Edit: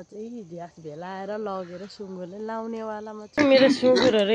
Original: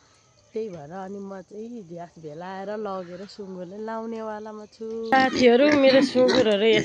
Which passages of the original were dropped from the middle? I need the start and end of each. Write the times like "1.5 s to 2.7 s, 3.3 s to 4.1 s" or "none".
4.8 s to 5.7 s